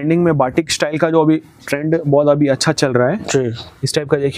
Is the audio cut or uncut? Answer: uncut